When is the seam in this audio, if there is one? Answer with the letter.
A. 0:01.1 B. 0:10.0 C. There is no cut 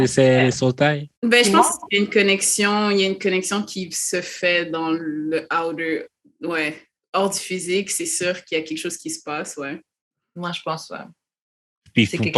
A